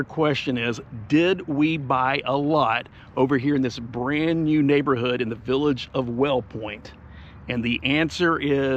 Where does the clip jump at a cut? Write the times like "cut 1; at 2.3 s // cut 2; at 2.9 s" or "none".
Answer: none